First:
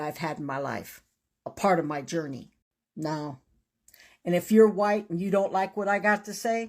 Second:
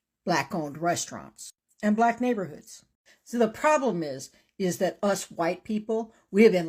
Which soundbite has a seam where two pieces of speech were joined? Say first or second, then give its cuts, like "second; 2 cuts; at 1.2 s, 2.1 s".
first; 1 cut; at 4.4 s